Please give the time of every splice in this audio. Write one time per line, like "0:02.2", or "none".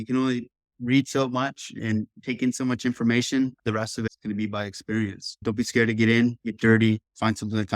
none